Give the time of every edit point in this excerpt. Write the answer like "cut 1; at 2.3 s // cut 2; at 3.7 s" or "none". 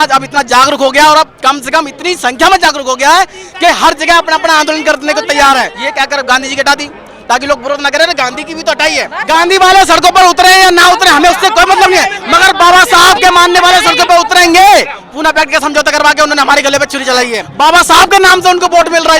cut 1; at 5.8 s // cut 2; at 9.2 s // cut 3; at 15.0 s // cut 4; at 17.4 s